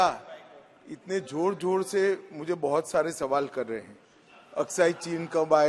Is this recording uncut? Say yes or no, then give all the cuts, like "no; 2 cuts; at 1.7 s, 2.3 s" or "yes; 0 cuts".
yes; 0 cuts